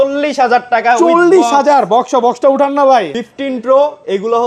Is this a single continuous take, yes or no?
no